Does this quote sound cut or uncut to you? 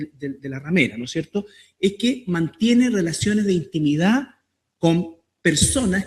uncut